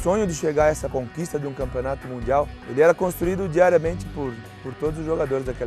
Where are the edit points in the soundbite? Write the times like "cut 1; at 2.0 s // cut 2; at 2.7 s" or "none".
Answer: cut 1; at 0.8 s // cut 2; at 2.6 s